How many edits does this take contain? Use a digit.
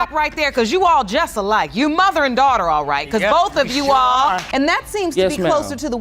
1